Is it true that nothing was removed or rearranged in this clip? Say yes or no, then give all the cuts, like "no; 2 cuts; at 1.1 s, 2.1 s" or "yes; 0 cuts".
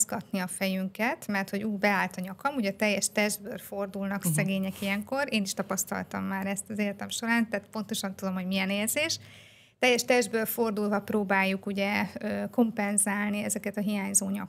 yes; 0 cuts